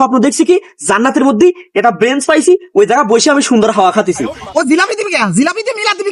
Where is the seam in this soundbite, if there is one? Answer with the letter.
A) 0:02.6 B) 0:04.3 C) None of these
B